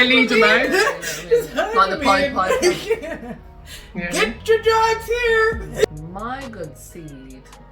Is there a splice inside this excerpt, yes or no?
yes